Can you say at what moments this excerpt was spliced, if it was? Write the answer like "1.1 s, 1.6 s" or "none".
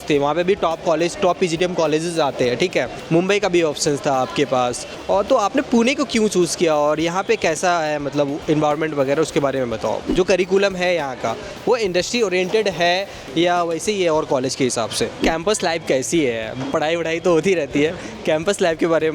3.0 s, 5.0 s, 10.0 s, 15.2 s